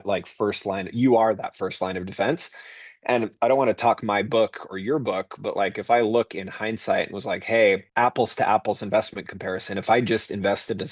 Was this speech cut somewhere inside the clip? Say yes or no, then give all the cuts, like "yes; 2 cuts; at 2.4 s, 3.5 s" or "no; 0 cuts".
yes; 1 cut; at 7.9 s